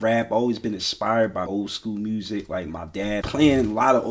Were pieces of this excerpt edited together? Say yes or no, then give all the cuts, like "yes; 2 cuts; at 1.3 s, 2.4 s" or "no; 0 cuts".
yes; 2 cuts; at 1.5 s, 3.2 s